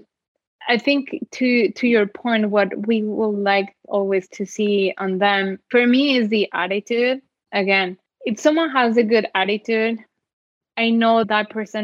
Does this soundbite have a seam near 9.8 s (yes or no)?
no